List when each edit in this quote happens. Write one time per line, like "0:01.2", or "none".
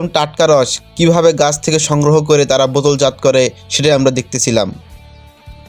none